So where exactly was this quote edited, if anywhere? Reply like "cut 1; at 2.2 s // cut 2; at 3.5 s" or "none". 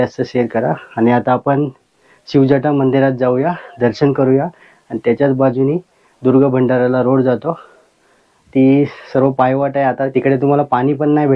none